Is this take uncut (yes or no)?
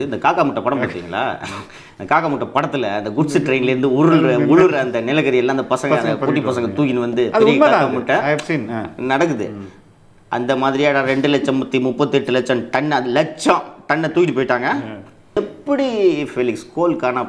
no